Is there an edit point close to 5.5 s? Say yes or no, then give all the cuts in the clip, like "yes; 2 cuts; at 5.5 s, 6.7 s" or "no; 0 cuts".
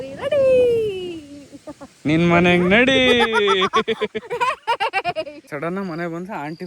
yes; 1 cut; at 5.5 s